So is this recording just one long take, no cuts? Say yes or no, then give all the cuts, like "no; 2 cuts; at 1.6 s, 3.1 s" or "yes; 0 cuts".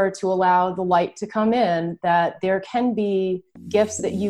yes; 0 cuts